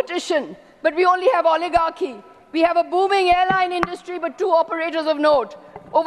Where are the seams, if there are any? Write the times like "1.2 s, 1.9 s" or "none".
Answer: none